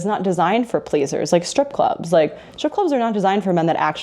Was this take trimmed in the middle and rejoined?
no; 0 cuts

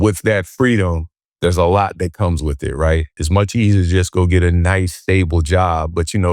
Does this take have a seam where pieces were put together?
yes; 1 cut; at 3.2 s

